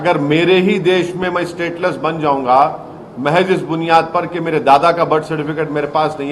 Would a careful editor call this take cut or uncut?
uncut